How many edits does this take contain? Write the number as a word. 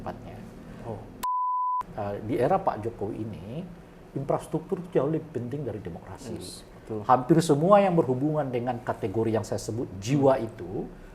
one